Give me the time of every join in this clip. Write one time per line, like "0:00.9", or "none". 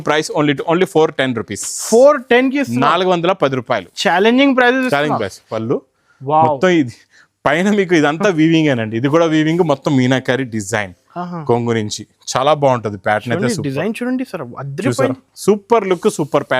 0:05.5